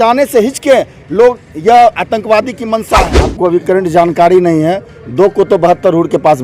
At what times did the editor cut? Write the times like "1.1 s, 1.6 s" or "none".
3.2 s